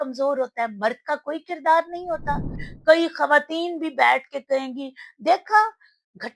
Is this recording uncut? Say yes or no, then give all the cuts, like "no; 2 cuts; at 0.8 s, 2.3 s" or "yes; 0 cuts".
no; 1 cut; at 2.7 s